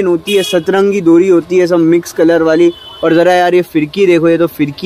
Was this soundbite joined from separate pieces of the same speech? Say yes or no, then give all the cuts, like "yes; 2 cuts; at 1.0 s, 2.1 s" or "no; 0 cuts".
no; 0 cuts